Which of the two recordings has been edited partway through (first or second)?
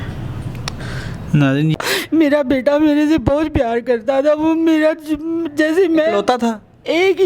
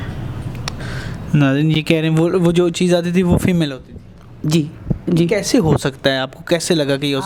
first